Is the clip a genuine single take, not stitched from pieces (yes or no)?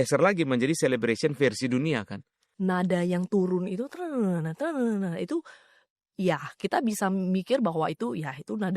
no